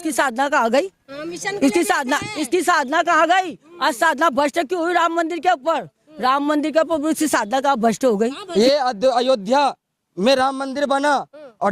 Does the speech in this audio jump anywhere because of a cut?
yes; 1 cut; at 8.4 s

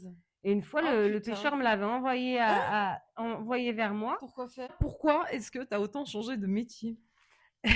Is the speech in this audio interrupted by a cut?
yes; 1 cut; at 4.8 s

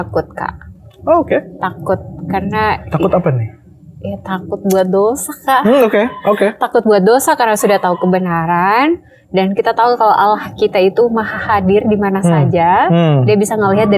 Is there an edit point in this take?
no; 0 cuts

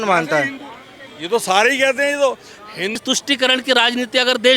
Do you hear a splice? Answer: yes; 1 cut; at 3.0 s

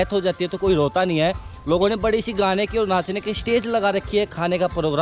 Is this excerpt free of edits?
yes; 0 cuts

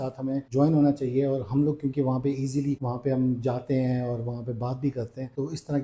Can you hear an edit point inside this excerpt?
no; 0 cuts

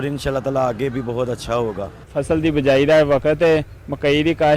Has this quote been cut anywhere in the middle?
yes; 1 cut; at 2.0 s

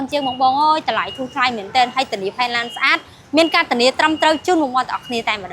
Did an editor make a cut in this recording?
no; 0 cuts

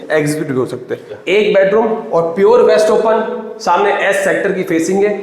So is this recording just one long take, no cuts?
no; 1 cut; at 1.1 s

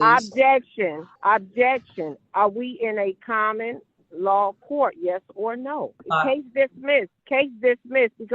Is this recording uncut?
no; 3 cuts; at 1.1 s, 6.0 s, 7.2 s

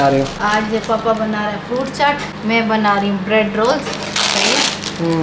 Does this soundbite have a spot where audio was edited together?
no; 0 cuts

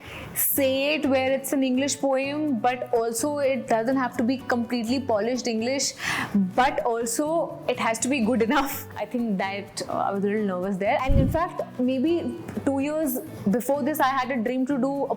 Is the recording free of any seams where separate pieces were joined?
no; 2 cuts; at 8.9 s, 11.0 s

